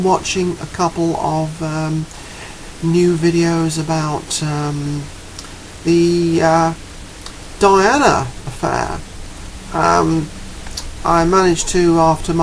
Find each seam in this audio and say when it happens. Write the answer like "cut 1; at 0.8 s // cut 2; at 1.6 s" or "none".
none